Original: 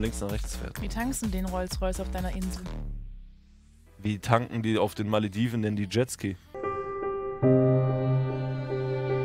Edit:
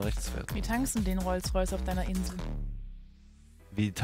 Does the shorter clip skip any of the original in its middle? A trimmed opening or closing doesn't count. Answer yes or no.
no